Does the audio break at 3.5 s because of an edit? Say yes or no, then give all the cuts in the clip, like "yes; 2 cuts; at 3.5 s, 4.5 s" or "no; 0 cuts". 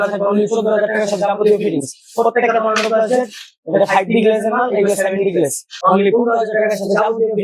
no; 1 cut; at 5.7 s